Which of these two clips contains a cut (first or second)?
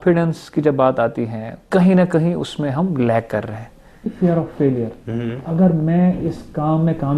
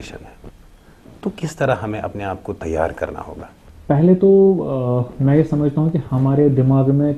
first